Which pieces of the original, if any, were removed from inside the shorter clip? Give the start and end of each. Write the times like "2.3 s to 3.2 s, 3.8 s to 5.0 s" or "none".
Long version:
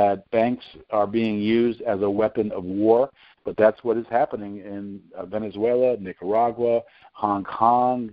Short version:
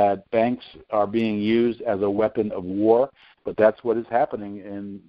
none